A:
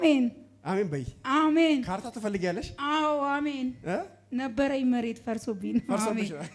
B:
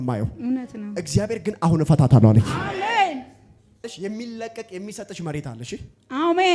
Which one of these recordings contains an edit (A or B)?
B